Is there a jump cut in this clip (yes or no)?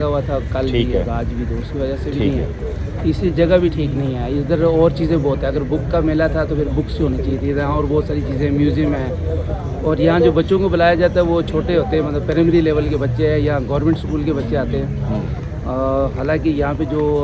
no